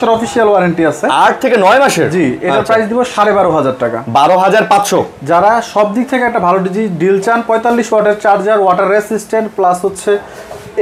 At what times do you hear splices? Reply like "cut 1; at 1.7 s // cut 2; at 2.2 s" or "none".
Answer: none